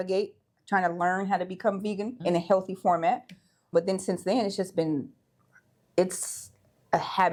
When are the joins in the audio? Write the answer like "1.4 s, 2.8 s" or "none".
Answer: none

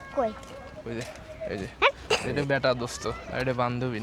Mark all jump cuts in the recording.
2.3 s, 3.2 s

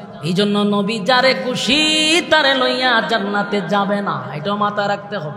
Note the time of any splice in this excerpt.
none

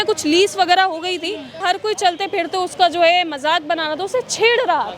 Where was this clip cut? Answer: 1.6 s

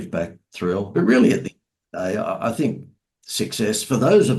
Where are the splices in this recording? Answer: 0.9 s

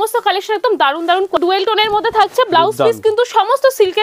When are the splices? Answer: 1.4 s

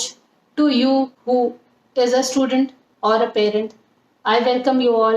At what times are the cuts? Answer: 1.2 s

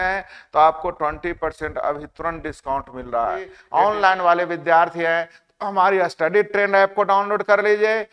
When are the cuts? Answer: 3.5 s

